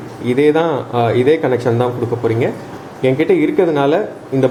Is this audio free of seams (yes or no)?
yes